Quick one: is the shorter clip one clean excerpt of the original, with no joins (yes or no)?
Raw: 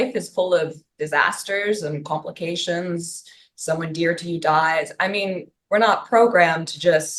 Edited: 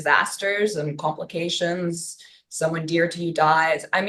yes